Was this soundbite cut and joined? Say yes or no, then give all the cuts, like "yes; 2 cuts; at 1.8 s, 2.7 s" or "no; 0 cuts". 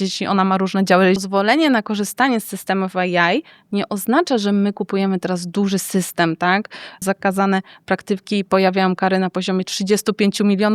yes; 2 cuts; at 1.2 s, 7.0 s